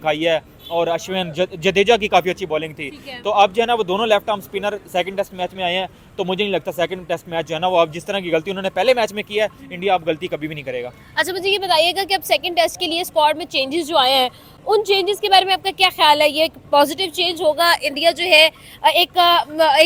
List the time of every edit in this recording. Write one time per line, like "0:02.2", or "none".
none